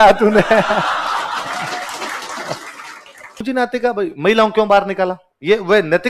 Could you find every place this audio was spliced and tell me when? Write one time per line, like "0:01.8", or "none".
0:03.4